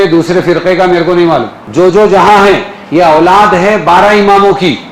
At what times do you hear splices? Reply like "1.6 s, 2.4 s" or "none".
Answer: 1.6 s

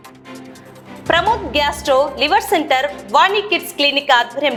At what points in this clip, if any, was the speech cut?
none

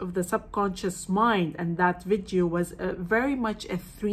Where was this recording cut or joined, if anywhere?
none

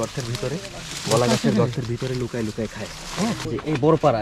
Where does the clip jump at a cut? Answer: 3.0 s

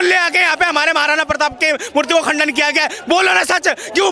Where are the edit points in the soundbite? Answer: none

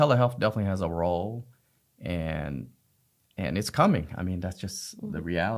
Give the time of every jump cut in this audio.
none

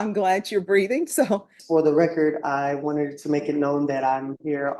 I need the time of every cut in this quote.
1.5 s

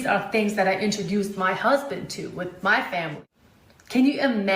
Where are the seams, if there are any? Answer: 2.9 s

